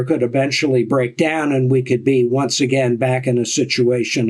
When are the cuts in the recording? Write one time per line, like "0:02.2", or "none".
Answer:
none

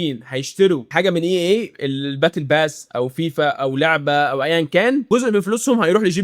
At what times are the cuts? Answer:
none

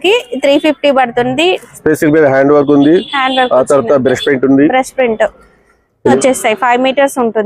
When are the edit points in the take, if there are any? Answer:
0:01.7
0:06.2

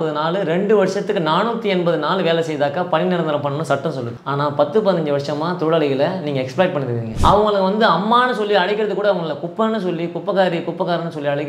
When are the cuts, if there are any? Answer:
0:04.1
0:07.1

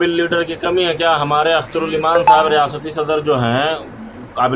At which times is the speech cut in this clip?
none

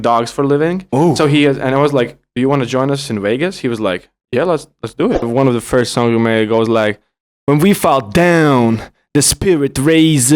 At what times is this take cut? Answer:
0:05.3

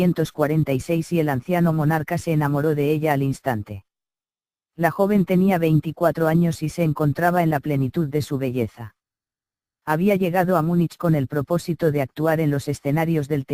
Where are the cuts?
0:08.2

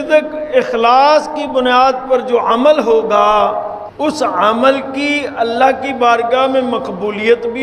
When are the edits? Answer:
0:03.8

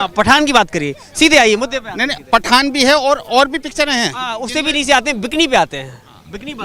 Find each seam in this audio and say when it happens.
none

